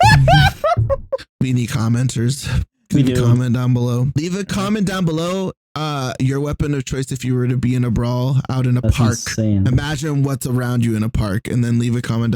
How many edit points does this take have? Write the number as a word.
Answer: one